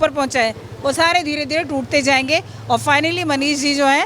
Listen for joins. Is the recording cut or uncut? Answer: uncut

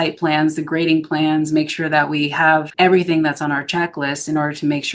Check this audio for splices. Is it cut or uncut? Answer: cut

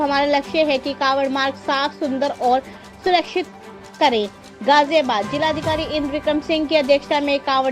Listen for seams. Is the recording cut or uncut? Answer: uncut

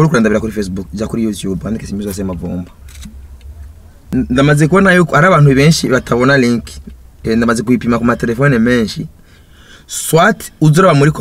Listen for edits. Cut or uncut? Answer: cut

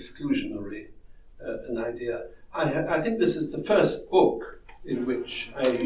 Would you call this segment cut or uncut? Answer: uncut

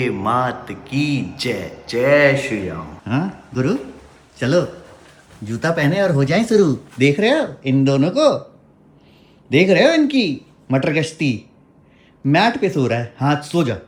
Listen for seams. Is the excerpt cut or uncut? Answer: uncut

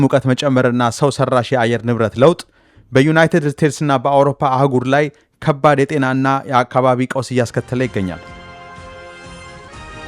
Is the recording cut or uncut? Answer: cut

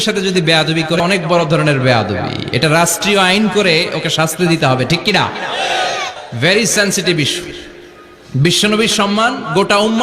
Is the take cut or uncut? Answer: cut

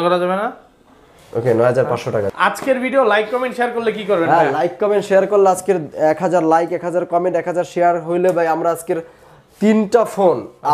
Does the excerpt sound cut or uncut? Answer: cut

